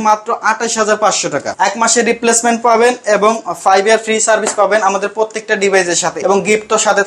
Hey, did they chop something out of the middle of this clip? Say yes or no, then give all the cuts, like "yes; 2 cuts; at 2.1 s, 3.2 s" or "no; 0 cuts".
yes; 2 cuts; at 1.5 s, 6.2 s